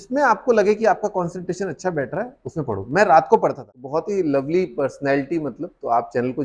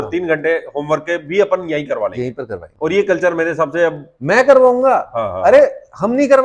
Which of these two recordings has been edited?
first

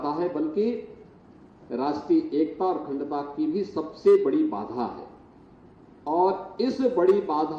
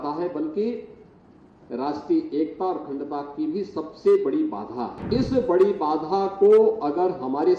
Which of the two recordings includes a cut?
second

